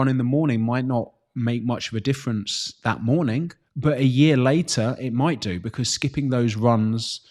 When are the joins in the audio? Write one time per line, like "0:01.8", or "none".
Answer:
0:03.6